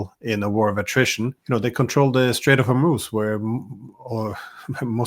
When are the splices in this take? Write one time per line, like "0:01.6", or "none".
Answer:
0:01.4